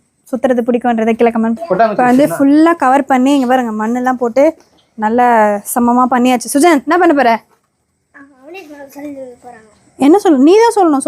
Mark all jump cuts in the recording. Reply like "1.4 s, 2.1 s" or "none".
1.6 s